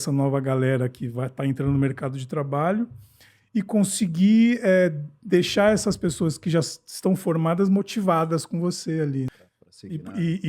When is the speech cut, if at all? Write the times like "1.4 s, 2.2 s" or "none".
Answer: 9.3 s